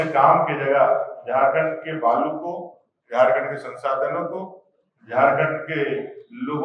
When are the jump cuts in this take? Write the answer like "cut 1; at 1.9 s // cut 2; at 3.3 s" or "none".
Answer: none